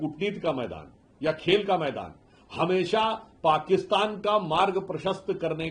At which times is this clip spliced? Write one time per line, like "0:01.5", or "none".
none